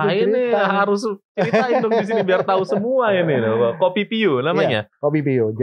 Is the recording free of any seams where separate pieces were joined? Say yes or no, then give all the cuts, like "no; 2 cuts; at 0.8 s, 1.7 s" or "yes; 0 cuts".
yes; 0 cuts